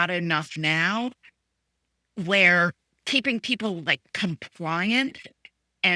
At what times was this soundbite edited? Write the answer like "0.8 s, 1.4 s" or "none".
none